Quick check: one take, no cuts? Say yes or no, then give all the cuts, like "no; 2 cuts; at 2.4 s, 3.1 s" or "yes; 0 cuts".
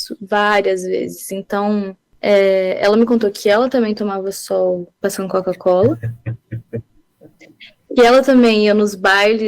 no; 2 cuts; at 2.0 s, 4.9 s